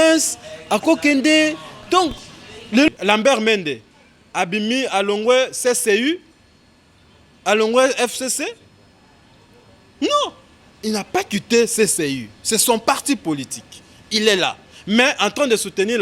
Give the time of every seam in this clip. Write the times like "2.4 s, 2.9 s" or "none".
2.9 s